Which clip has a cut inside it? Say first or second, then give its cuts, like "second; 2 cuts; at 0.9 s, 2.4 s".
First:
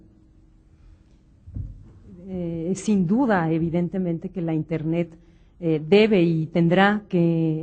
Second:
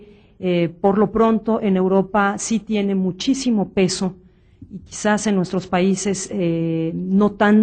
first; 1 cut; at 1.5 s